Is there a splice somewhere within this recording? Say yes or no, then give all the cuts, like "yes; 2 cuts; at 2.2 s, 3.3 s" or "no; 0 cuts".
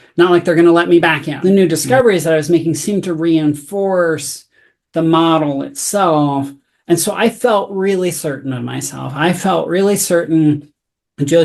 yes; 1 cut; at 1.3 s